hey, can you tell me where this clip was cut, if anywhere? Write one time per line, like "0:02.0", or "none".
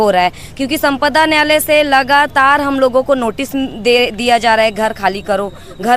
none